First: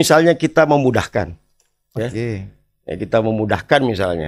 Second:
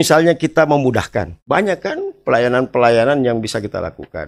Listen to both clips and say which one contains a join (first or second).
second